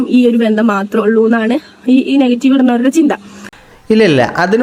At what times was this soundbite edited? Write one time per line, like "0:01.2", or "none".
none